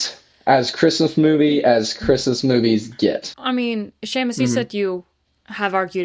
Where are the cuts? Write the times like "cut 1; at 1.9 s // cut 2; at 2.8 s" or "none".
cut 1; at 3.3 s